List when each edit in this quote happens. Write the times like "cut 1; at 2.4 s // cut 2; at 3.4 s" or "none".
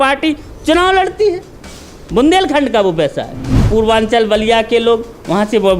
cut 1; at 3.6 s

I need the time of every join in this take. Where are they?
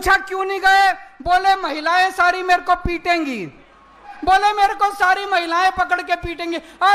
cut 1; at 4.1 s

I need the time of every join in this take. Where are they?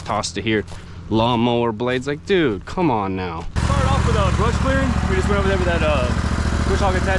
cut 1; at 3.6 s

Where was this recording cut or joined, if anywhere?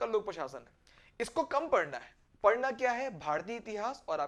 none

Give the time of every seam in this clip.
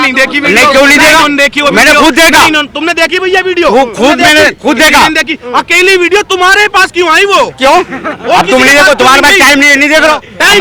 none

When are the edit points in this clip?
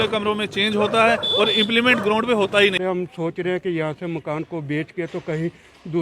cut 1; at 2.8 s

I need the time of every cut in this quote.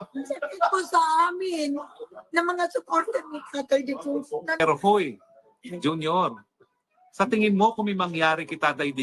cut 1; at 4.6 s

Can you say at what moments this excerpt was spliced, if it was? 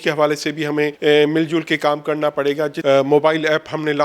cut 1; at 0.9 s // cut 2; at 2.8 s

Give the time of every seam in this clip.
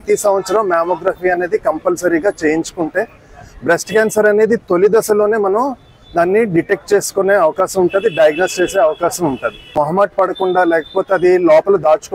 cut 1; at 9.7 s

